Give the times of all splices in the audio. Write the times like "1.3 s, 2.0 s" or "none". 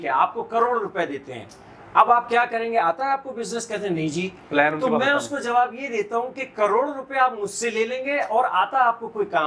none